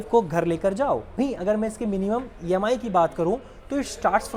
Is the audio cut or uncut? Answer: uncut